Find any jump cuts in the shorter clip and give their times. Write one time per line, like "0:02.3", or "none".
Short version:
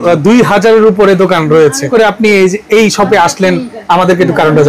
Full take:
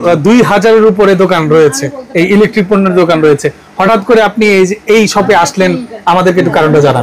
0:01.9